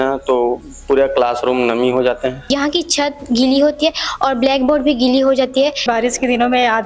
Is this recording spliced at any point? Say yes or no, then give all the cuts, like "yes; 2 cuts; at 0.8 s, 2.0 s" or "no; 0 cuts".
yes; 2 cuts; at 2.5 s, 5.9 s